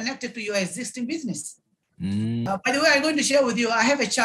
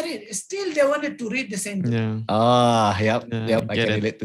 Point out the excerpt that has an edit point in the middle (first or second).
first